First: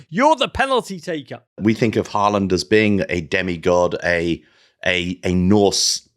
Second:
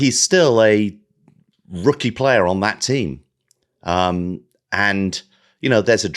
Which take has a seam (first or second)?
first